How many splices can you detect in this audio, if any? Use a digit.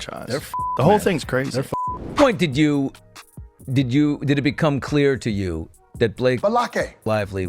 1